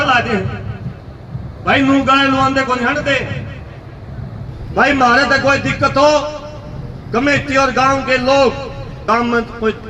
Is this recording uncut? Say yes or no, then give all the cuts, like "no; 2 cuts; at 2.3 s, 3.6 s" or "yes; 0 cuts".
no; 2 cuts; at 4.4 s, 8.9 s